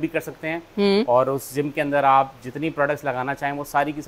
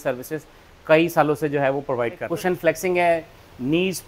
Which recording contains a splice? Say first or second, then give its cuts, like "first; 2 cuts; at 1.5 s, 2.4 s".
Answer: second; 1 cut; at 2.2 s